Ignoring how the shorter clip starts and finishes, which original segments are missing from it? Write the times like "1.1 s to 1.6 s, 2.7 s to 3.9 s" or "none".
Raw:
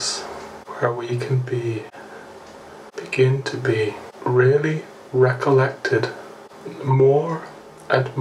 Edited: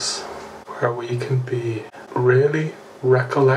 2.0 s to 4.1 s